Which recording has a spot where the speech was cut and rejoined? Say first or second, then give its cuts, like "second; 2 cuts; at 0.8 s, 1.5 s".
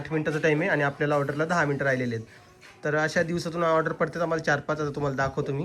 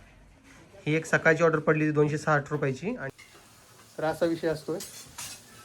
second; 1 cut; at 3.0 s